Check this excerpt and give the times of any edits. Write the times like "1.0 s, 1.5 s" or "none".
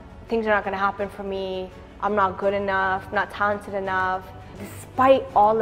4.7 s